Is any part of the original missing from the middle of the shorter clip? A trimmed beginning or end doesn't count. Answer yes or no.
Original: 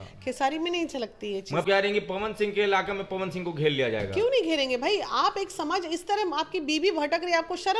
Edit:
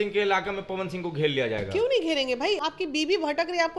yes